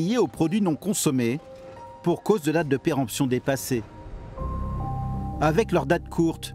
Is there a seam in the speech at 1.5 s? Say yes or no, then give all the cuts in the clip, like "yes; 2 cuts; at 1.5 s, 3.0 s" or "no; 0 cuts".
no; 0 cuts